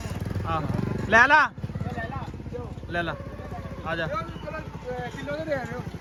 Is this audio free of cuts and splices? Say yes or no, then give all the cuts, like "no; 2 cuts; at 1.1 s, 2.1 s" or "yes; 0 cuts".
yes; 0 cuts